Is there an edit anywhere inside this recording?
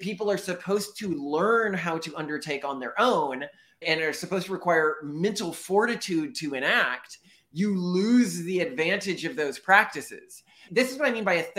yes; 2 cuts; at 3.8 s, 10.6 s

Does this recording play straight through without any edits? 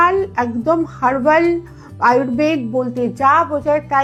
yes; 0 cuts

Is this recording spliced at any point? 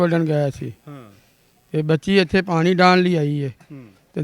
no; 0 cuts

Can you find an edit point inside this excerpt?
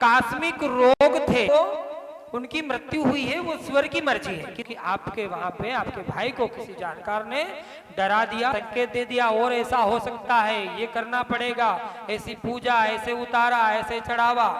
yes; 3 cuts; at 1.5 s, 4.6 s, 8.5 s

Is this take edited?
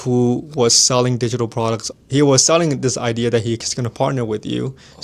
yes; 1 cut; at 1.9 s

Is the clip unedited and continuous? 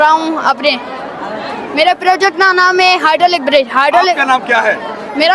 yes; 0 cuts

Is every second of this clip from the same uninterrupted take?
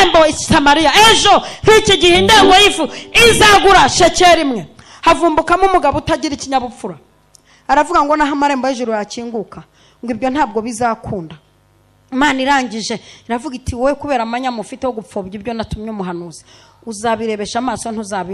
yes; 0 cuts

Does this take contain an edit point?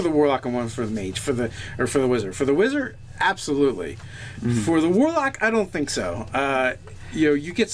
yes; 1 cut; at 2.7 s

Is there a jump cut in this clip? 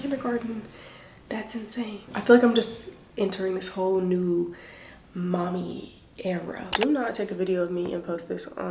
yes; 2 cuts; at 2.0 s, 6.7 s

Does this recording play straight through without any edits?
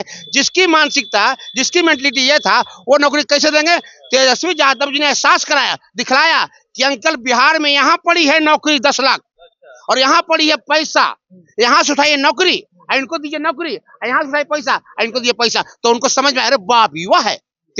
yes; 0 cuts

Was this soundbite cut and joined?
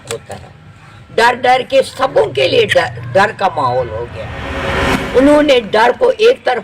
yes; 1 cut; at 4.8 s

